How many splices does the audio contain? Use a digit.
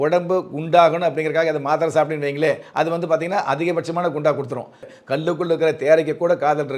1